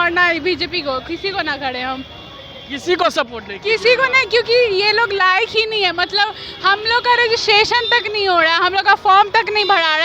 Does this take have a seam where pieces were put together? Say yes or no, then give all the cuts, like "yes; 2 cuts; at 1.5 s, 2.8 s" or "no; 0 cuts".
no; 0 cuts